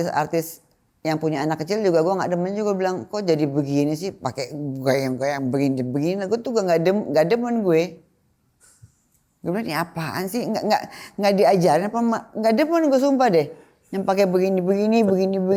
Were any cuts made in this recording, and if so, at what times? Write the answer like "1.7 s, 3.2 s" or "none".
none